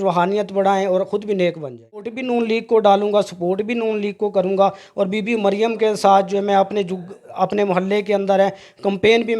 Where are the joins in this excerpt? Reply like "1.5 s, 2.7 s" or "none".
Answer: 2.2 s